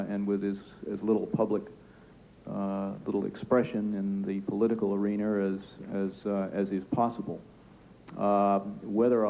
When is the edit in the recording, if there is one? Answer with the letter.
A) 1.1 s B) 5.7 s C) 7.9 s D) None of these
D